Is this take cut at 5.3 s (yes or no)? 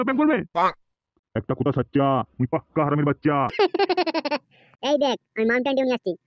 no